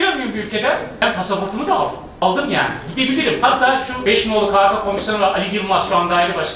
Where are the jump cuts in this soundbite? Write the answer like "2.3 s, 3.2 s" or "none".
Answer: 1.0 s, 2.2 s, 4.0 s